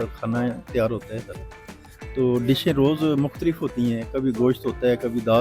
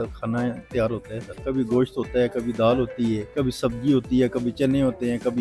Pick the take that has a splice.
second; 2 cuts; at 1.4 s, 3.3 s

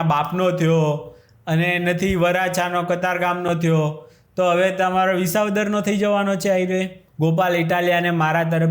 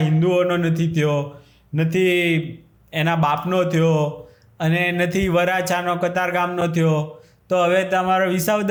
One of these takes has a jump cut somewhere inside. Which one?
first; 1 cut; at 7.0 s

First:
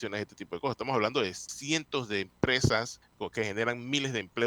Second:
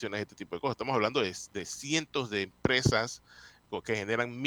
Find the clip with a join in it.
first; 2 cuts; at 1.5 s, 3.0 s

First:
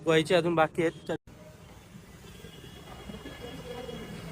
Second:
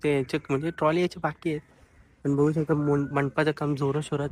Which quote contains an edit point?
first; 1 cut; at 1.2 s

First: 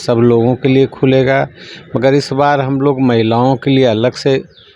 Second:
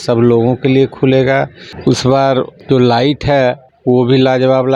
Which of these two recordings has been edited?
second; 3 cuts; at 1.6 s, 2.6 s, 3.7 s

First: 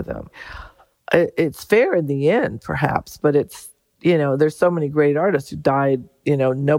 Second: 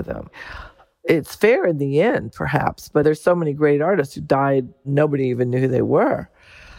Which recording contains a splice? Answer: second; 3 cuts; at 1.0 s, 3.0 s, 4.9 s

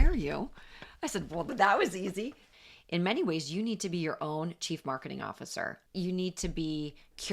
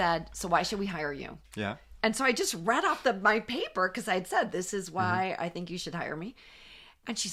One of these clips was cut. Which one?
first; 3 cuts; at 1.5 s, 2.4 s, 5.8 s

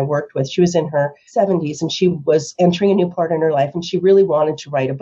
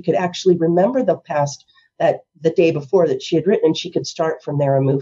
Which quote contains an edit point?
first; 1 cut; at 1.2 s

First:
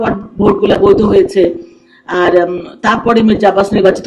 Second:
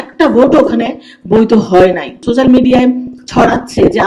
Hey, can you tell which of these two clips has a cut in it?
second; 1 cut; at 2.2 s

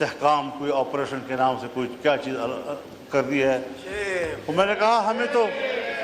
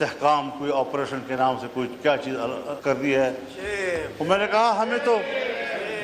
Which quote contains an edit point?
second; 1 cut; at 2.7 s

